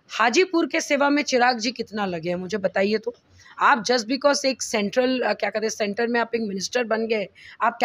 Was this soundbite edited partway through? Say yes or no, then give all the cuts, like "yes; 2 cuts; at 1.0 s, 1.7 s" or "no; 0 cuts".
no; 0 cuts